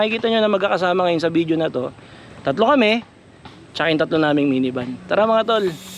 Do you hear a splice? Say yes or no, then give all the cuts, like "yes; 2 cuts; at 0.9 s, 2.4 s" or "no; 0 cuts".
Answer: no; 0 cuts